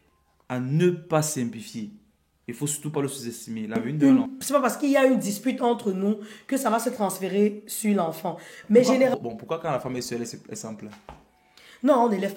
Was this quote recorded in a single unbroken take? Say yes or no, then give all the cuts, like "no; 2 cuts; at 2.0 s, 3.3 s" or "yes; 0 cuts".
no; 2 cuts; at 3.9 s, 9.1 s